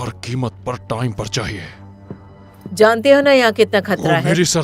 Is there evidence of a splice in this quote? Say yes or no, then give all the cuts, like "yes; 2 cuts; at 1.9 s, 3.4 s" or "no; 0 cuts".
no; 0 cuts